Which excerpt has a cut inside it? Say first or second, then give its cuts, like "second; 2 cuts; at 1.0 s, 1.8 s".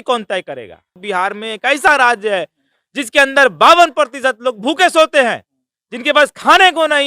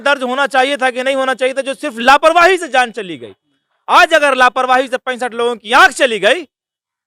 first; 1 cut; at 1.0 s